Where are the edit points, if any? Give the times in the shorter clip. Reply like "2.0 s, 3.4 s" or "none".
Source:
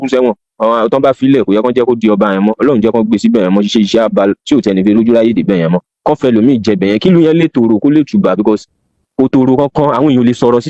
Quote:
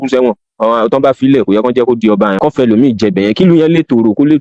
2.3 s